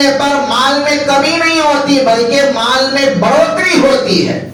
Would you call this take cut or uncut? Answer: uncut